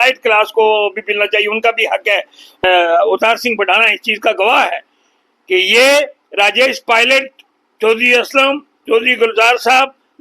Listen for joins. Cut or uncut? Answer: cut